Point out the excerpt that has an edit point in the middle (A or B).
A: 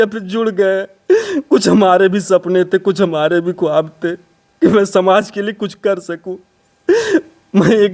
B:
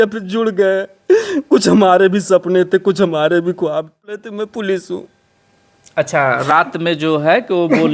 B